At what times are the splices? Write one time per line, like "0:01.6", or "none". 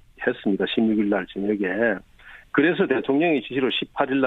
0:01.9